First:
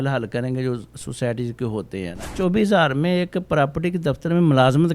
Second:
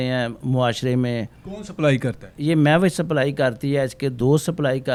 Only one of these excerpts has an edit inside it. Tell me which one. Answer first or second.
first